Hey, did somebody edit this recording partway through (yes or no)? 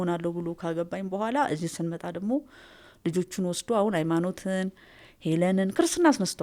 no